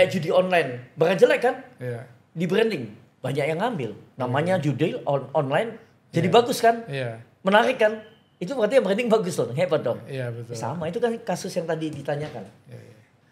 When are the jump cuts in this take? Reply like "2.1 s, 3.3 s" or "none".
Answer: none